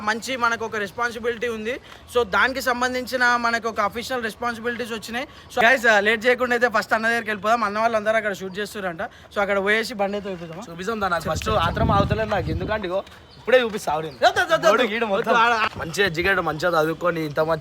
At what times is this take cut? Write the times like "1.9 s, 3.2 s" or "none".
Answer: 5.6 s, 15.7 s